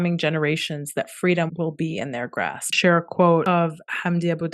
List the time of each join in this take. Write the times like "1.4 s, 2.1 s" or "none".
1.5 s, 2.8 s, 3.4 s

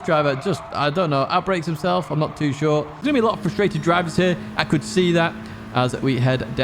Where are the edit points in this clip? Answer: 2.9 s

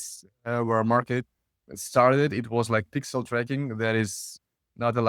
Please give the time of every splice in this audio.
none

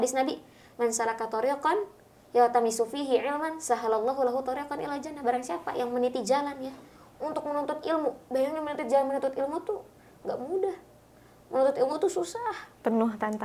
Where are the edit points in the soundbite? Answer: none

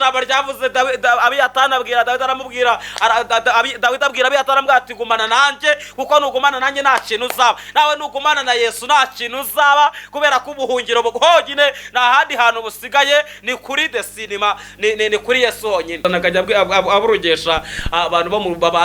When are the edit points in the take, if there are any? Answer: 16.0 s

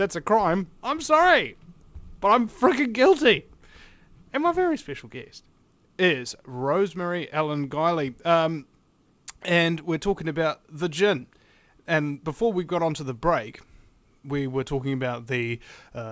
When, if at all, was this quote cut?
none

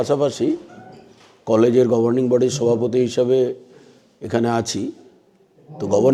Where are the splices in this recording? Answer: none

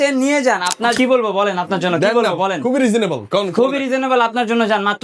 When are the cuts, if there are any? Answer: 0.9 s

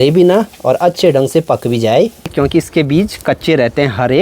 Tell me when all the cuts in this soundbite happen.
2.3 s

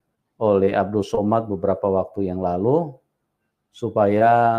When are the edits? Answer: none

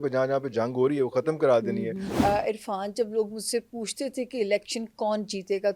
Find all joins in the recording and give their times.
2.1 s

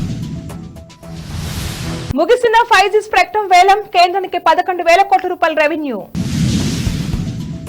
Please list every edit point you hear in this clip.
1.5 s

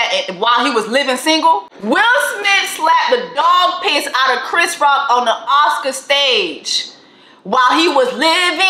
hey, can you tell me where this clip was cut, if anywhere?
1.7 s

